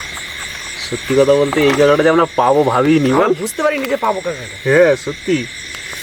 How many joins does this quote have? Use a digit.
0